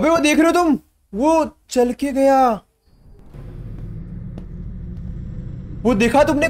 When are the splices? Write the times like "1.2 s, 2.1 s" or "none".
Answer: 3.3 s